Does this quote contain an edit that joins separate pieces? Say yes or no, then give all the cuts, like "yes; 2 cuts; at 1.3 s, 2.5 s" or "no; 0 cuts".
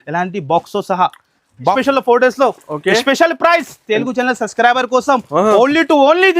yes; 1 cut; at 1.7 s